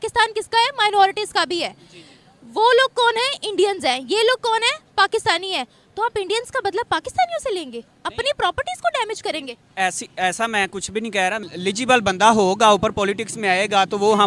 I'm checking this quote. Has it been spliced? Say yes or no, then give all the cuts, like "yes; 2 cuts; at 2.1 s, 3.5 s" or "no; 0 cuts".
yes; 1 cut; at 11.4 s